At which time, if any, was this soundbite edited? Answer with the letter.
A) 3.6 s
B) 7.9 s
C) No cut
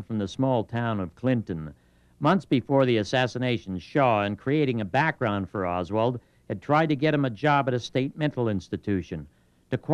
A